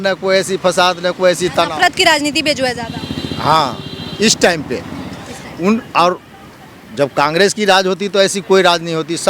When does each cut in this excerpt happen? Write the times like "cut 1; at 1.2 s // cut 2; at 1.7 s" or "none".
none